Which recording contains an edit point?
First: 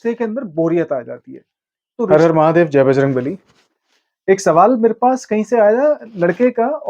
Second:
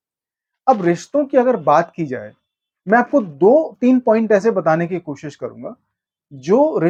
first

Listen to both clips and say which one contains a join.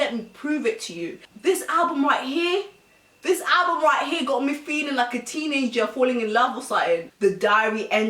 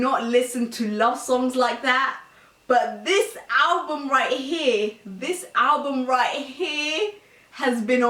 first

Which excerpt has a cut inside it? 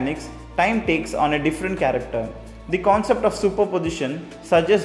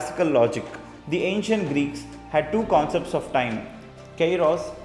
second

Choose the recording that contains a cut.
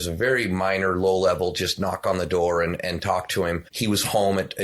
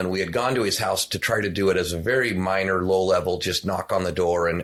first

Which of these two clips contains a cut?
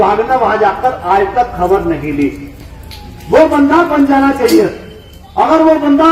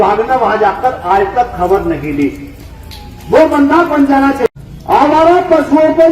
second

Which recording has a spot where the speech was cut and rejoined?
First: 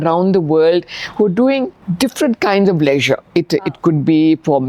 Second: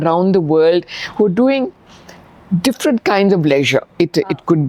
first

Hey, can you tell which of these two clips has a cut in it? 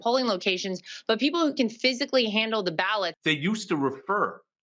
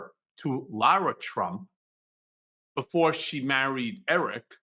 first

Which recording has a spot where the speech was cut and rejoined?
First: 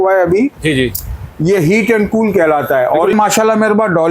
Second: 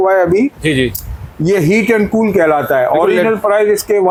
first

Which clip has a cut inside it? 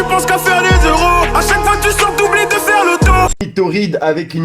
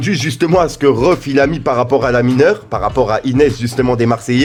first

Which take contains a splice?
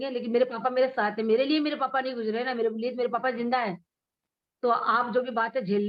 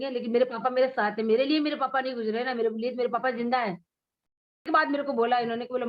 second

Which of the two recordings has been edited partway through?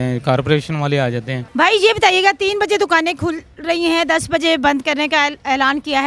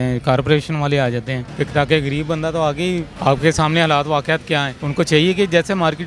second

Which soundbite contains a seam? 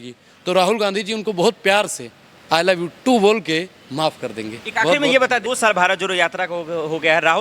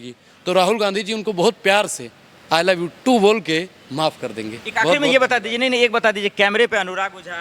first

